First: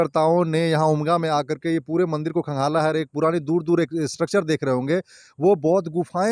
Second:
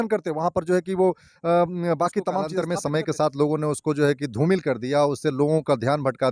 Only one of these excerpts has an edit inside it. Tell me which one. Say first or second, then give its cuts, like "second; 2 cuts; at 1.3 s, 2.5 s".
second; 1 cut; at 2.6 s